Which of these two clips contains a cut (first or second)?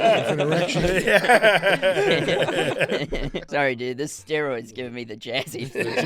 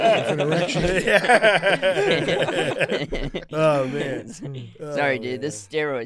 first